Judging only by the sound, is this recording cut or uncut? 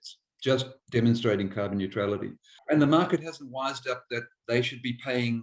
cut